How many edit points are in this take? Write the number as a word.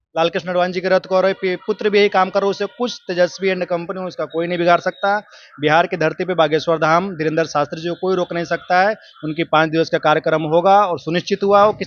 zero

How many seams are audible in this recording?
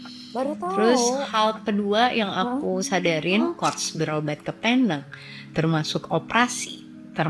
one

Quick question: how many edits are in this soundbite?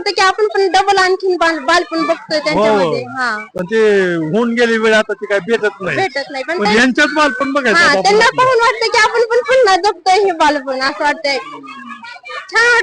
zero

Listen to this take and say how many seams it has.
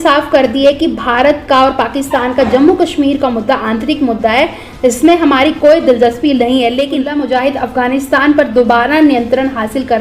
one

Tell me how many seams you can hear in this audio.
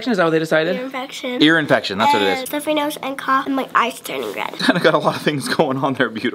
three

